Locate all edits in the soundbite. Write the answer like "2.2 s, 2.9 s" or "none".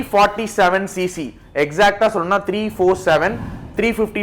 none